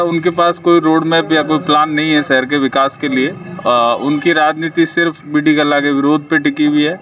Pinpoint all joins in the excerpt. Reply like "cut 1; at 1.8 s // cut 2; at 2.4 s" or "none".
none